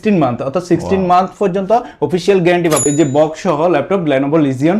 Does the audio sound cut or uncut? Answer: cut